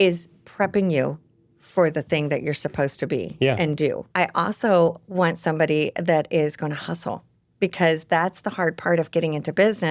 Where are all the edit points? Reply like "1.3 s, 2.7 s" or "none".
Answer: 4.0 s